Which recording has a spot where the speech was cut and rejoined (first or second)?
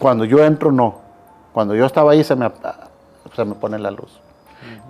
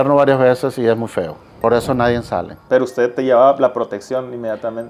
second